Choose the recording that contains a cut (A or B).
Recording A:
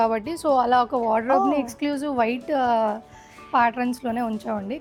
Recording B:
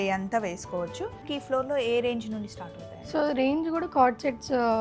B